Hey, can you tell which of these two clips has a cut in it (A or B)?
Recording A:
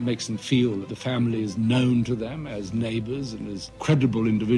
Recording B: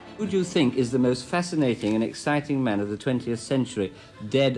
A